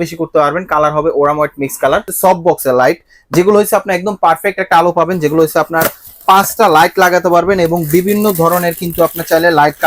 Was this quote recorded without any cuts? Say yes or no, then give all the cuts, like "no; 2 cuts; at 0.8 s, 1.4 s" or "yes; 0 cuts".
no; 1 cut; at 2.1 s